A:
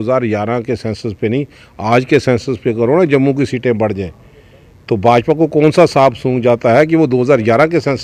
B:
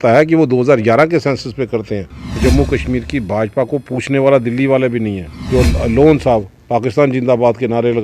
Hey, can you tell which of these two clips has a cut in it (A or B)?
B